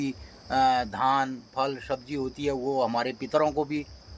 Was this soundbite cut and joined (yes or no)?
no